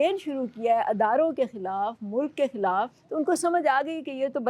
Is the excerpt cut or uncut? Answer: cut